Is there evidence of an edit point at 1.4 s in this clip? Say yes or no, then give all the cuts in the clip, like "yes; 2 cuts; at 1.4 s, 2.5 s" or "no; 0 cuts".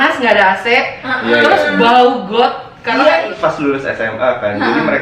no; 1 cut; at 3.3 s